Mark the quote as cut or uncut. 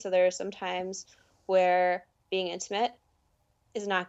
uncut